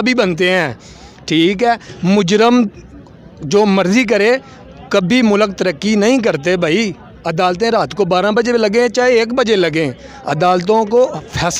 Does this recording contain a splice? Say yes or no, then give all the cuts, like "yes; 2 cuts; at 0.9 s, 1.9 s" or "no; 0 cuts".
no; 0 cuts